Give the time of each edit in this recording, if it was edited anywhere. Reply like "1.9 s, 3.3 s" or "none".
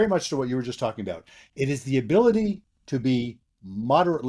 none